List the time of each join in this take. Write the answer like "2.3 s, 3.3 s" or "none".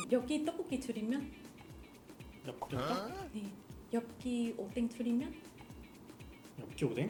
none